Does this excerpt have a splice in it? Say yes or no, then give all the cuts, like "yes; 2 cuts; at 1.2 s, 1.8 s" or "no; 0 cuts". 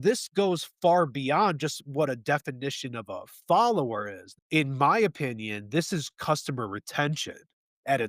yes; 1 cut; at 4.2 s